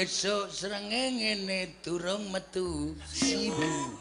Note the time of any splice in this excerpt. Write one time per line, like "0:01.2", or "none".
none